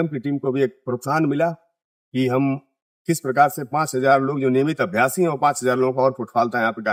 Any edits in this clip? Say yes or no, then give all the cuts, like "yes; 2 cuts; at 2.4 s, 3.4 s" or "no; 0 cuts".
no; 0 cuts